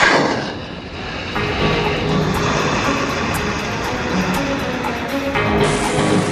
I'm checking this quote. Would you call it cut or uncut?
cut